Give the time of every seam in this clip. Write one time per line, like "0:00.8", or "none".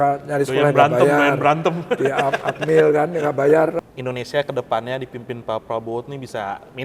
0:03.8

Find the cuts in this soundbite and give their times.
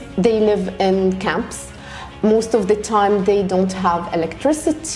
none

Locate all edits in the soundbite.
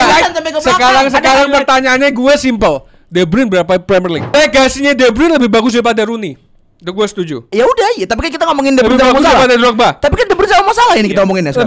0:04.3
0:07.5

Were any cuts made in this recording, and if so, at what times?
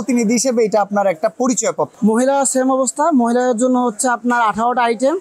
0:01.9

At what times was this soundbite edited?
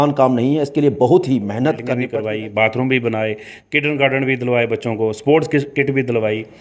0:02.0

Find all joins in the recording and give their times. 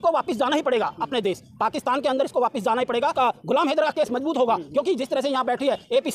0:03.1

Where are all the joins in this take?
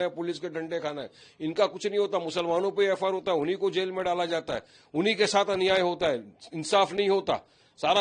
none

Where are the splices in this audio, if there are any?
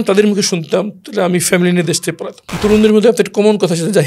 0:02.5

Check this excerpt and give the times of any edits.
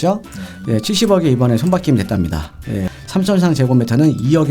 0:02.9

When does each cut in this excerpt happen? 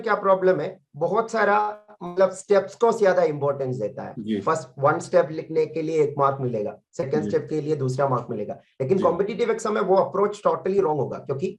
none

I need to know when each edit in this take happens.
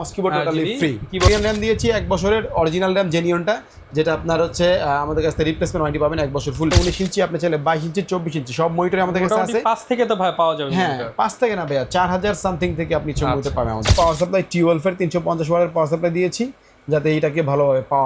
0:01.3
0:06.7
0:13.9

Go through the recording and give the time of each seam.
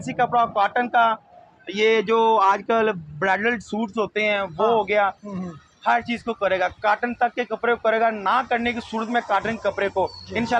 none

